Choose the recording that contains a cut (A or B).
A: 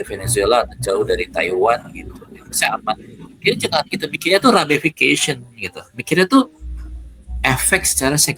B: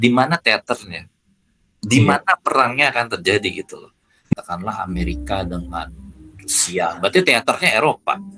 B